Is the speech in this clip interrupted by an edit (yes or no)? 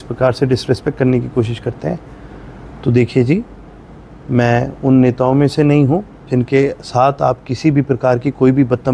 no